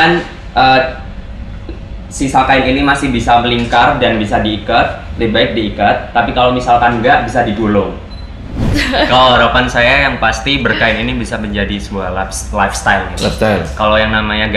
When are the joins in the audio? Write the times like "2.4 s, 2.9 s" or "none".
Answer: 8.6 s